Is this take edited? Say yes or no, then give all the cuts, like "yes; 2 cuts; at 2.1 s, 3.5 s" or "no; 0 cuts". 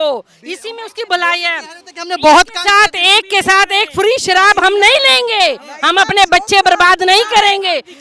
no; 0 cuts